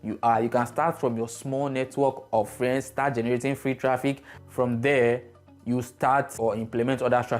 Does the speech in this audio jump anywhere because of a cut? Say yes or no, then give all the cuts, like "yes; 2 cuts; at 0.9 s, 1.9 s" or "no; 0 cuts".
yes; 1 cut; at 6.3 s